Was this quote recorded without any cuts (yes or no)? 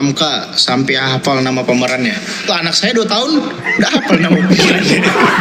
yes